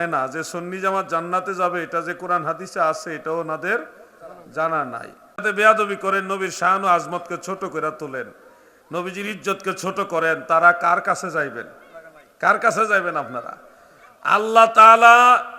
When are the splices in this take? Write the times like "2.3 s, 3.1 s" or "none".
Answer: 5.4 s